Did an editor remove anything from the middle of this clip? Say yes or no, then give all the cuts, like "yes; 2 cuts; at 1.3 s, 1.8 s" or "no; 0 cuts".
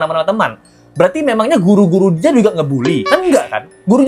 no; 0 cuts